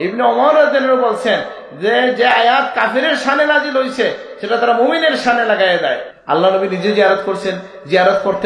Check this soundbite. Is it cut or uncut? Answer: cut